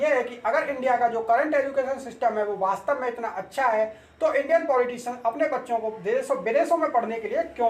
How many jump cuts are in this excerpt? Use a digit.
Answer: 0